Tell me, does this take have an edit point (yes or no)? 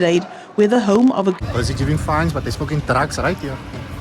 yes